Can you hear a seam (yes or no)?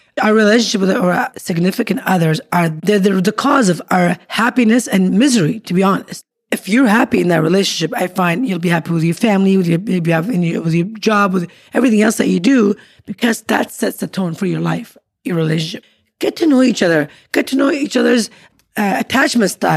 yes